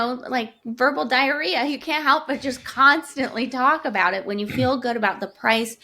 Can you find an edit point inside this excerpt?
no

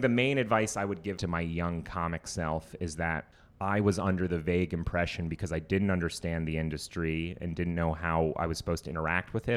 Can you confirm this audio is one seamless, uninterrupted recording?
no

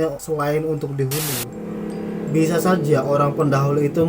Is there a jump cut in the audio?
yes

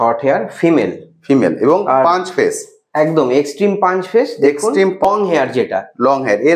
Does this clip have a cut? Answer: yes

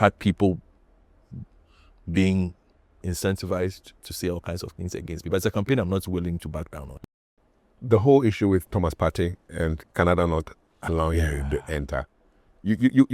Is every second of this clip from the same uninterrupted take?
no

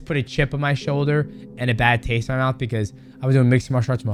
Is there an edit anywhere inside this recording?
no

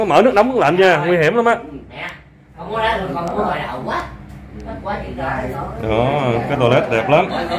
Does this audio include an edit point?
no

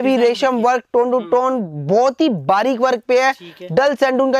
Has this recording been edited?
no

